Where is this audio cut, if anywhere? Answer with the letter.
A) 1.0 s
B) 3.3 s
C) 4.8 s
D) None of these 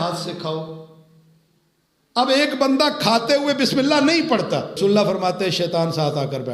C